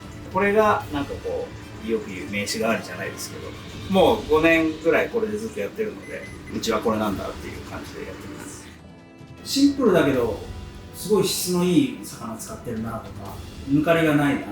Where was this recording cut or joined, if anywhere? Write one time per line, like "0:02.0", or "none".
0:08.8
0:13.6